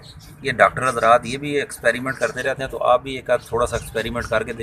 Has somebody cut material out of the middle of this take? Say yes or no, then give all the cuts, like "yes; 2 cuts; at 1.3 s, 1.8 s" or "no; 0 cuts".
no; 0 cuts